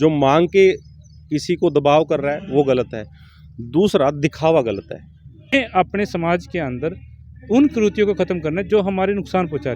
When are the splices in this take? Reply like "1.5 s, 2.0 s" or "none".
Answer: 5.5 s